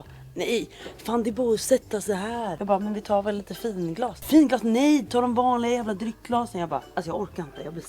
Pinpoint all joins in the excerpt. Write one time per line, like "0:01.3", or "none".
0:02.6
0:04.2
0:06.9